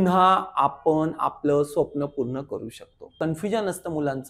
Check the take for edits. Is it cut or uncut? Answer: cut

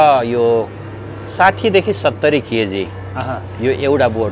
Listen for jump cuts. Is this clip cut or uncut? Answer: uncut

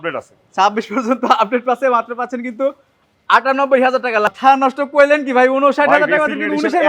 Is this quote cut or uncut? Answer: cut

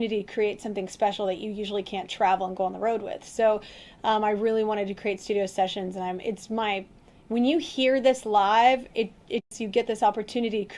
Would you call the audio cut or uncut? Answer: cut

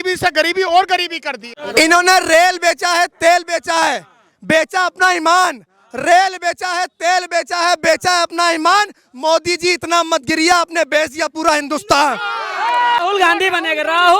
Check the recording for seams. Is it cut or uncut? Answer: cut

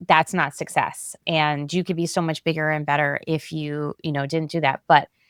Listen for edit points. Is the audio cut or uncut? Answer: uncut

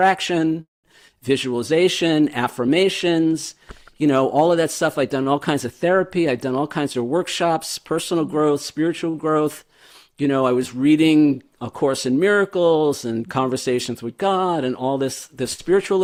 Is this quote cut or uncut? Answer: uncut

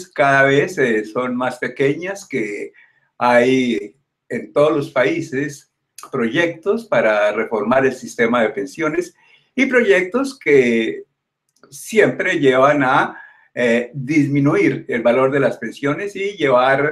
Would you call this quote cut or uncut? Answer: cut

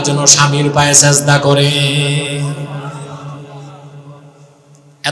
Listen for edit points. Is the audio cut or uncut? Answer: uncut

